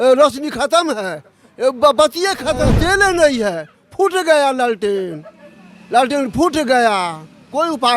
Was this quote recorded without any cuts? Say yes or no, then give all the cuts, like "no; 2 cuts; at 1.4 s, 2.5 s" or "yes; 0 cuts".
no; 1 cut; at 2.7 s